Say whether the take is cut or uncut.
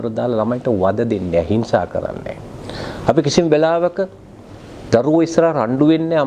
uncut